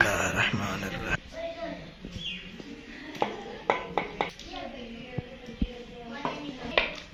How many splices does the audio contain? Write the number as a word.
zero